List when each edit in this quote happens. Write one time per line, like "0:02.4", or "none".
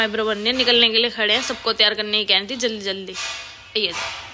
none